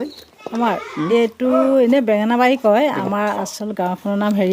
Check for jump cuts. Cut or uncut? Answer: uncut